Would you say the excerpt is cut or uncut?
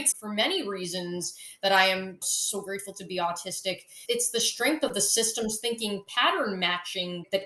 uncut